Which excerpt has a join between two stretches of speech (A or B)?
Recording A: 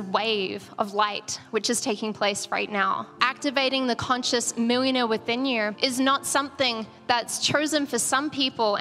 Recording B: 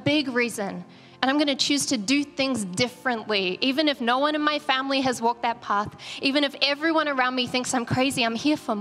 A